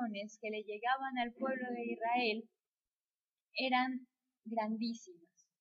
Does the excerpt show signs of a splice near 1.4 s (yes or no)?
no